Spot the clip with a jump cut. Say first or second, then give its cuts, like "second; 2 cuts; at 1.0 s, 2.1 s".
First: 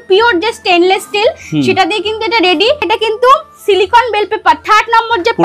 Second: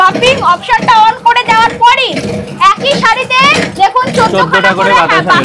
first; 1 cut; at 2.8 s